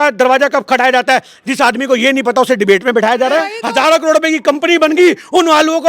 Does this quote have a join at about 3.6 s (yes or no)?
yes